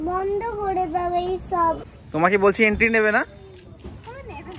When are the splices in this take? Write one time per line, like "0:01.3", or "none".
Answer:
0:01.9